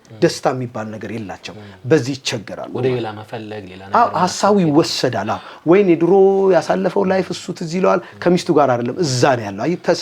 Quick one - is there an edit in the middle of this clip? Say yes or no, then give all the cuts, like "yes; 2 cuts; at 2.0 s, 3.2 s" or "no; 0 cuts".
no; 0 cuts